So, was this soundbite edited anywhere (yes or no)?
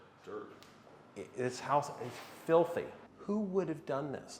yes